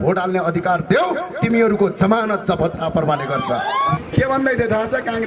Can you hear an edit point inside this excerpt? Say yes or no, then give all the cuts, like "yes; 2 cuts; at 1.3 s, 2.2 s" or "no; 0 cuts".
yes; 1 cut; at 3.9 s